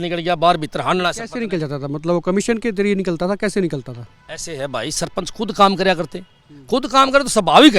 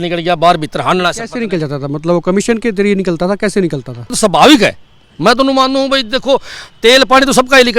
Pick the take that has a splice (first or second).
second